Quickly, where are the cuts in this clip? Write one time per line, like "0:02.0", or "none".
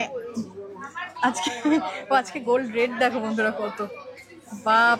none